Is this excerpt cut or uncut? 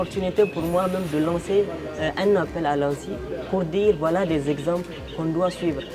uncut